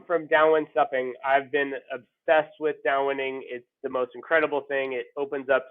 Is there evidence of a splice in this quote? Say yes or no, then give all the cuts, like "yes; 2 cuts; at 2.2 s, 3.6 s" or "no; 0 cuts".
no; 0 cuts